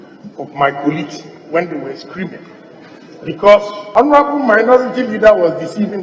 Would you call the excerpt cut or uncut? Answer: cut